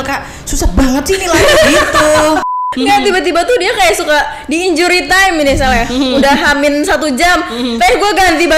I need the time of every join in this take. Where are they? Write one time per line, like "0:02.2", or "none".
0:02.7